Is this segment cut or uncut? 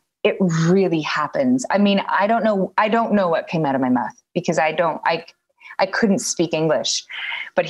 uncut